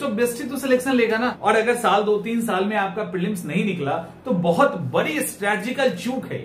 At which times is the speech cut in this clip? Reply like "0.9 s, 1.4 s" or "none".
1.4 s